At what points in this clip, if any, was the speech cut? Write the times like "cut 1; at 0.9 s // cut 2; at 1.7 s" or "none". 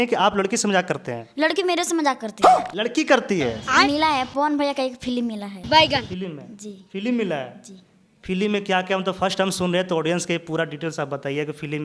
cut 1; at 3.7 s